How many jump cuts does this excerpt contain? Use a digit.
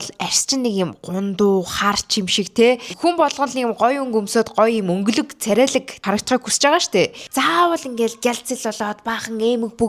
3